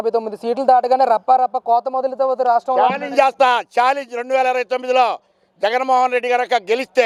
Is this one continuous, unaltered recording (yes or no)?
yes